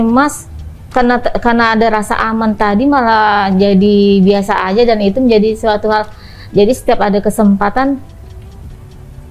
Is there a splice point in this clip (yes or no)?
no